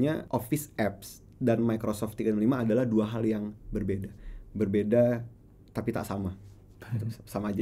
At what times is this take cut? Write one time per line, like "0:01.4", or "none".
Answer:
none